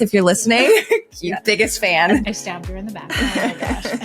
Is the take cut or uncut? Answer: cut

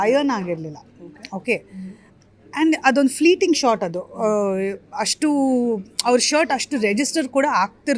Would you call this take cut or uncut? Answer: uncut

